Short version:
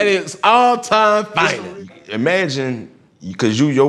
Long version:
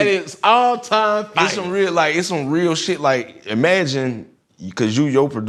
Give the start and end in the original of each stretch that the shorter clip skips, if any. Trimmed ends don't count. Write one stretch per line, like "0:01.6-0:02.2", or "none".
0:01.8-0:03.1

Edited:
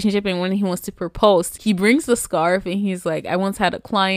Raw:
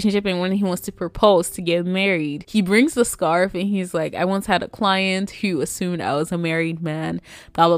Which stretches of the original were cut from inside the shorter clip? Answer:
0:01.5-0:02.4

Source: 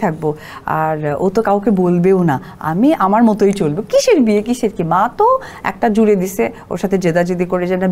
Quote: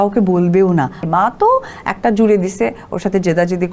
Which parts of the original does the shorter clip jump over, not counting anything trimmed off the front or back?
0:02.5-0:04.8

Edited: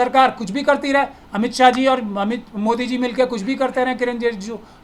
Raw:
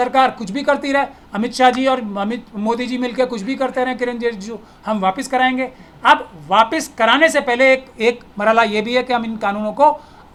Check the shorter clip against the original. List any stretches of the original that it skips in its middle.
none

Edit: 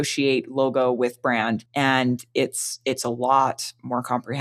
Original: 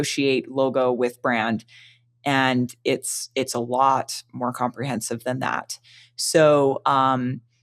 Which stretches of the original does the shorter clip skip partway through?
0:01.7-0:02.2

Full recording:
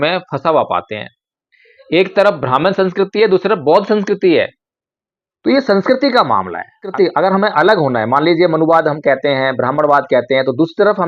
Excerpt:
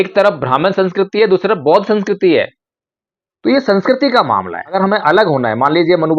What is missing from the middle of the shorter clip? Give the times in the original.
0:06.8-0:07.3

